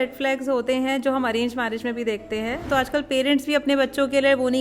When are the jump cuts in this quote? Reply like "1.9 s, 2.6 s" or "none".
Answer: 2.7 s

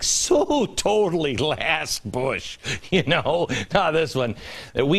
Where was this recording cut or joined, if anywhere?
2.6 s

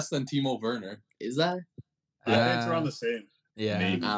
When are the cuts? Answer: none

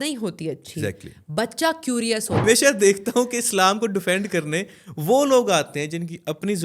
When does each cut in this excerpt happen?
2.4 s

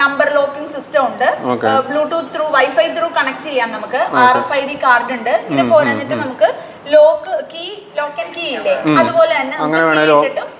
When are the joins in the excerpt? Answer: none

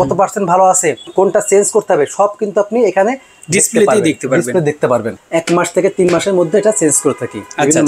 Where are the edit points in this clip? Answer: 1.0 s, 5.1 s

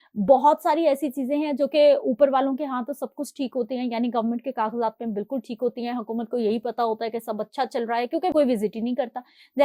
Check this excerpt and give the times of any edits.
8.3 s

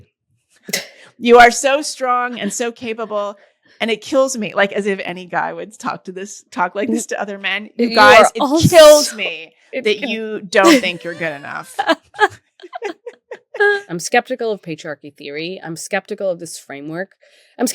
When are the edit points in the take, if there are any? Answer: 13.8 s

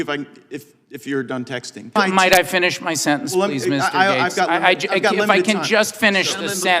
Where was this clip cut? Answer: 1.9 s

